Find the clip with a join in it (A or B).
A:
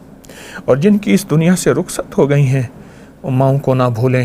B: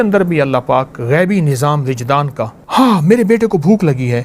B